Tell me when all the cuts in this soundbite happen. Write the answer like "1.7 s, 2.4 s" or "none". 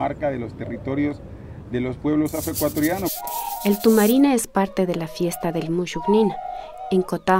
3.1 s